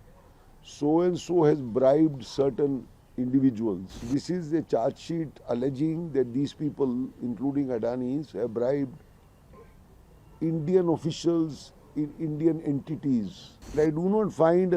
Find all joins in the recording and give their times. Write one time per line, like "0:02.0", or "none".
0:04.1
0:13.8